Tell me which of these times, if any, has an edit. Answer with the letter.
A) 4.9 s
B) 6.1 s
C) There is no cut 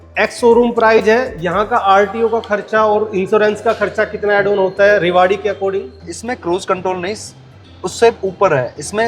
B